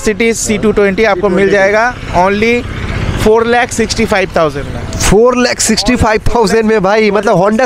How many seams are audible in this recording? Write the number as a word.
zero